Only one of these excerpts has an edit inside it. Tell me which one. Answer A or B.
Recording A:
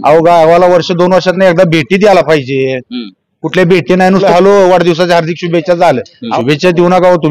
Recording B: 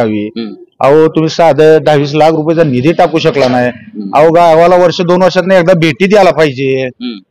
A